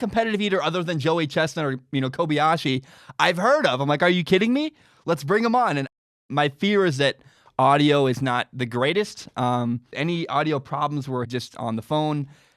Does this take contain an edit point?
yes; 3 cuts; at 6.2 s, 9.9 s, 11.3 s

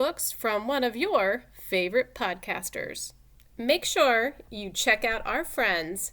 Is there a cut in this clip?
yes; 1 cut; at 3.5 s

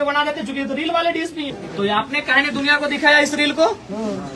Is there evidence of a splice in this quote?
yes; 1 cut; at 1.6 s

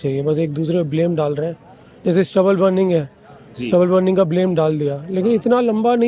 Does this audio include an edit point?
no; 0 cuts

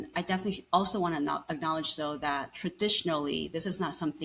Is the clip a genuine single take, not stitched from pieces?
yes; 0 cuts

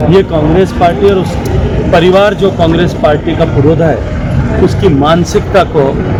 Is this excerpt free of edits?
yes; 0 cuts

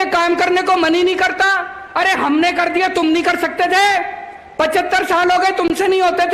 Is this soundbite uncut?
yes; 0 cuts

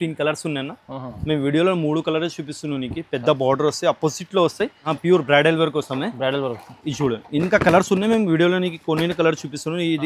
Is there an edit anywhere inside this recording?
yes; 1 cut; at 4.9 s

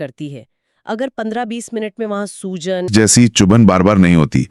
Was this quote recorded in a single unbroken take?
no; 1 cut; at 2.9 s

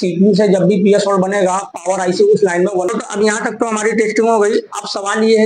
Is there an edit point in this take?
yes; 1 cut; at 2.9 s

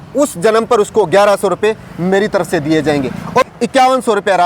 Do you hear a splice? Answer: yes; 1 cut; at 3.4 s

